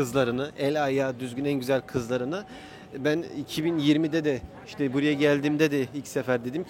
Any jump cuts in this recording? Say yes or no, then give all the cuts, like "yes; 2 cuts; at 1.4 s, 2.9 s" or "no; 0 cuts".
no; 0 cuts